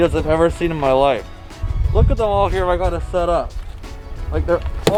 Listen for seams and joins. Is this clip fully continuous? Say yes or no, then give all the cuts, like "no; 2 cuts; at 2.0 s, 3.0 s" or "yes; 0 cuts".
yes; 0 cuts